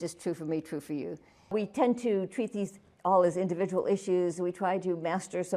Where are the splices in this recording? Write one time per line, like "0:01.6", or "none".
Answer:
0:01.5

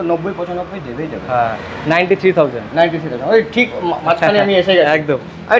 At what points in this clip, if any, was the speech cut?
none

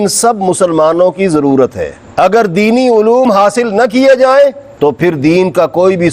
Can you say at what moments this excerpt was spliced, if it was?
0:02.0

